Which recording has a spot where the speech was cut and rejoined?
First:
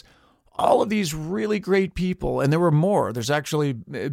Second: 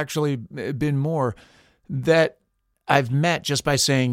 second; 1 cut; at 2.7 s

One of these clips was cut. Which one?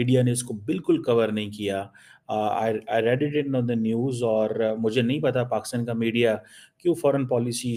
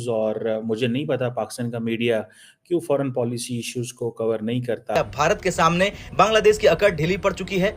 second; 1 cut; at 5.0 s

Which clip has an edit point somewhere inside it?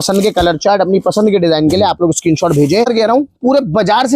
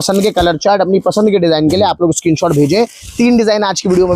first; 1 cut; at 2.9 s

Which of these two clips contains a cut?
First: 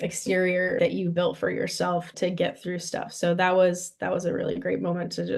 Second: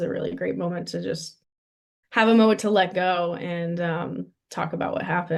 first; 2 cuts; at 0.8 s, 2.1 s

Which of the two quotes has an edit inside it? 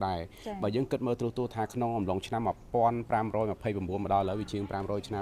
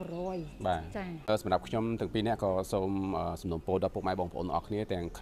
second; 1 cut; at 1.3 s

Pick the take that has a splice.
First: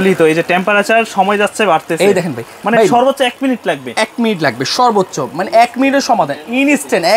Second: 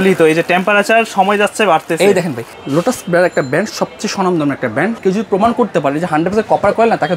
second; 2 cuts; at 2.5 s, 5.0 s

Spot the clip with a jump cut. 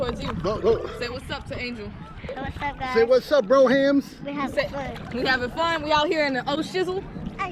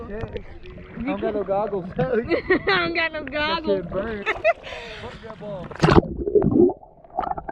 second; 1 cut; at 4.2 s

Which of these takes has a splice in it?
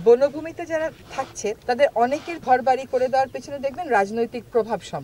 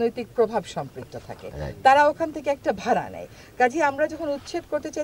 first; 2 cuts; at 1.4 s, 2.3 s

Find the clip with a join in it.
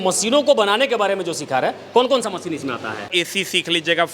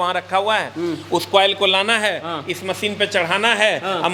first; 1 cut; at 3.1 s

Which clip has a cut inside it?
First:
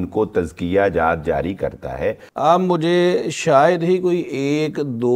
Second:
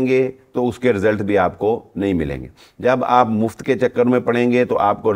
first; 1 cut; at 2.3 s

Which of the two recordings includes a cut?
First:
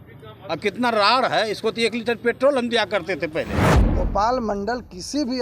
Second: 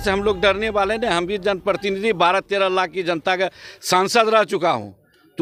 first; 1 cut; at 3.8 s

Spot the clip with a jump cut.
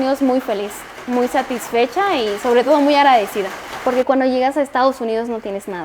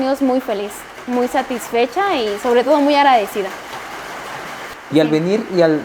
first; 1 cut; at 3.6 s

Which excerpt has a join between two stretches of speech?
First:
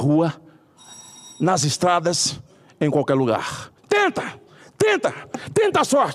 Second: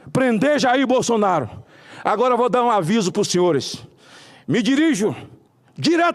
first; 1 cut; at 3.7 s

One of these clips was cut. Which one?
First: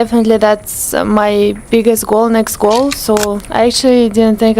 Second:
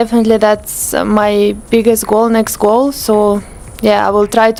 first; 1 cut; at 3.4 s

